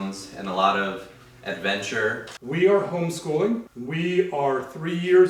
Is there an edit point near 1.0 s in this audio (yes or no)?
no